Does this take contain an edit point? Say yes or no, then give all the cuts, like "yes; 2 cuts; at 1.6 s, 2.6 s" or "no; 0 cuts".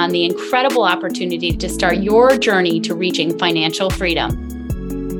yes; 1 cut; at 4.3 s